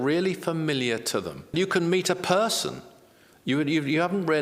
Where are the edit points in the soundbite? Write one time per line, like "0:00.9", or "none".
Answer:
0:01.5